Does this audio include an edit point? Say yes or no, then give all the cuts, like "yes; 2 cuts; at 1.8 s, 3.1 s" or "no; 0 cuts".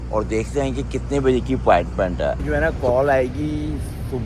yes; 1 cut; at 2.4 s